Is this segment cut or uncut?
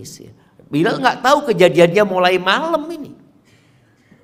uncut